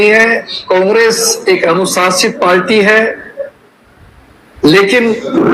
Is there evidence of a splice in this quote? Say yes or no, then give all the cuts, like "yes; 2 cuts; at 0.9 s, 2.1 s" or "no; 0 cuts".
no; 0 cuts